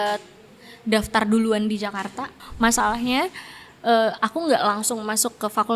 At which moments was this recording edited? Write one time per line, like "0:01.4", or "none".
0:02.4